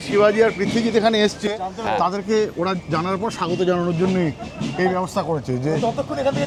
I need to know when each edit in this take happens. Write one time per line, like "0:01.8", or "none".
none